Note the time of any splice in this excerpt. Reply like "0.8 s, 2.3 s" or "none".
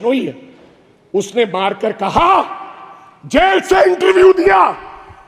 none

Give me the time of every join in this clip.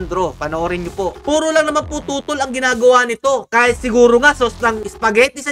1.2 s

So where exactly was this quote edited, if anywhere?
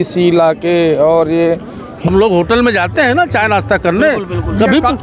1.9 s

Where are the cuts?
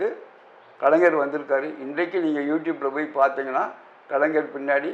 none

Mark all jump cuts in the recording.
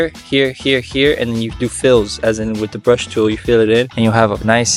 none

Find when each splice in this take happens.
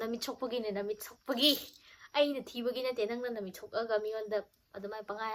none

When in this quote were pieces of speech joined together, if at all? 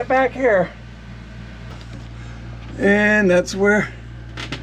1.7 s

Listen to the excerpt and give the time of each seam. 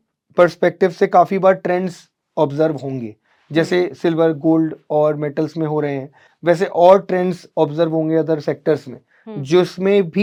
none

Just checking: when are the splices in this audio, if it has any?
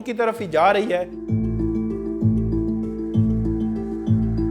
1.2 s

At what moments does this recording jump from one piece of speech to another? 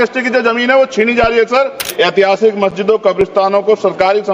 1.8 s

